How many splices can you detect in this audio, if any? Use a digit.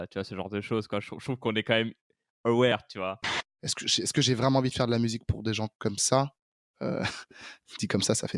1